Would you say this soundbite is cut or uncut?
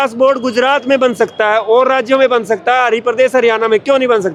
uncut